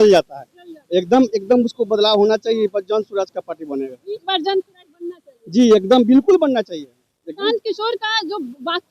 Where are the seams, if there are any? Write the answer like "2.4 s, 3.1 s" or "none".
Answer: none

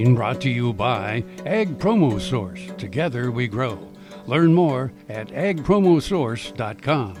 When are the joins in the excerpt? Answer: none

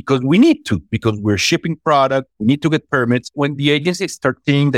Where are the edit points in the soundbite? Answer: 2.3 s, 3.3 s

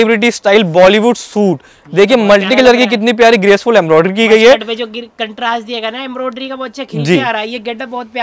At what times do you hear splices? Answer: none

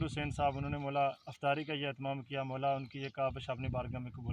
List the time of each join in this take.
none

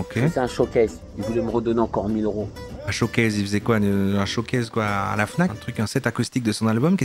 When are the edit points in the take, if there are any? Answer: 5.5 s

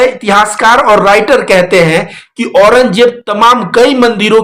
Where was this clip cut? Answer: none

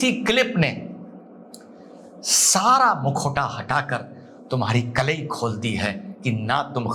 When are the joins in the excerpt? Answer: none

